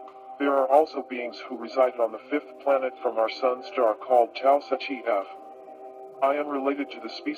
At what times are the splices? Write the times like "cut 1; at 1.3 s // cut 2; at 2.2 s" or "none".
cut 1; at 3.0 s